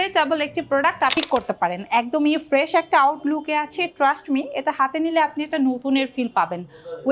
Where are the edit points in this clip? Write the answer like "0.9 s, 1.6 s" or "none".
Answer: 1.2 s